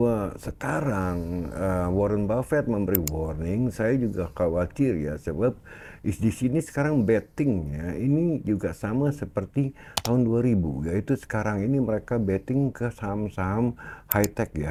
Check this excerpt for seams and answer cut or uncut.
uncut